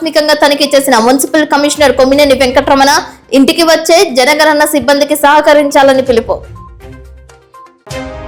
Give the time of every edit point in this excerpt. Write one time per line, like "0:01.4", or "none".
none